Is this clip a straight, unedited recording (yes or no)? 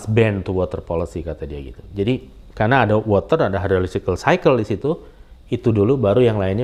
yes